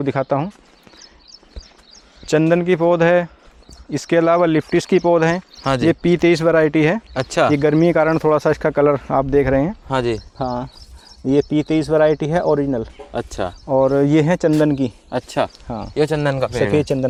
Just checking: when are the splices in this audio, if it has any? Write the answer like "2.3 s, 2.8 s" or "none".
none